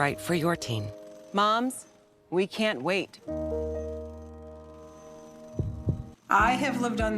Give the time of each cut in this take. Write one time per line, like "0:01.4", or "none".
0:06.1

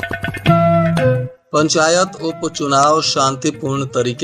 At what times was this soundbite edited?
0:01.3

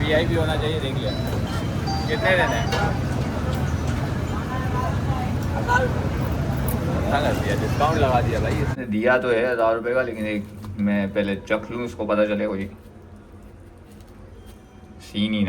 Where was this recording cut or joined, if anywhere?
0:08.7

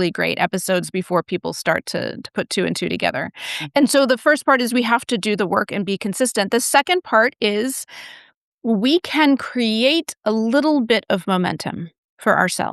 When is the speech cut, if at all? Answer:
none

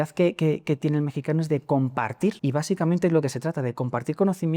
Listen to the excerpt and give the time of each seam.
0:02.4

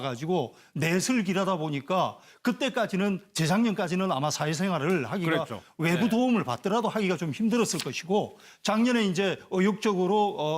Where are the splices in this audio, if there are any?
0:03.6

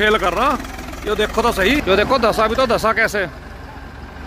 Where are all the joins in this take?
0:01.8

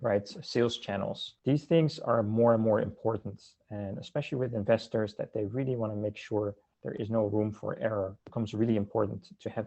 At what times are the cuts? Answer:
0:01.3
0:08.2

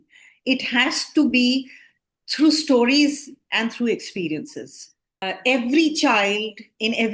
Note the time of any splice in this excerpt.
0:05.3

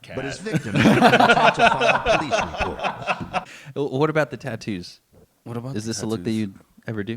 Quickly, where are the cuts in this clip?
0:03.4

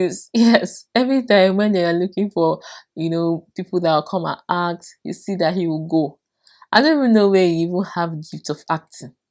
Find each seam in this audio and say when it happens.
none

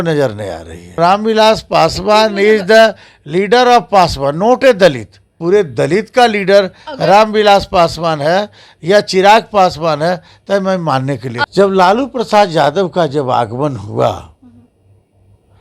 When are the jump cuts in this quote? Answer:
0:01.0
0:05.4
0:11.4

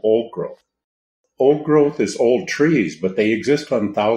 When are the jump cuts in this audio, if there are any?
0:01.2

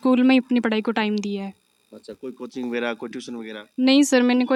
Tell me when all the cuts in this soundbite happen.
none

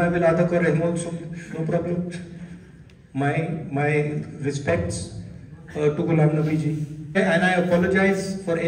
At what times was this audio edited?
0:07.2

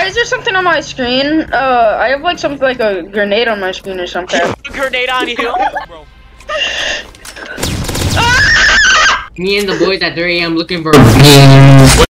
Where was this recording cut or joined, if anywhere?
0:05.9
0:09.3

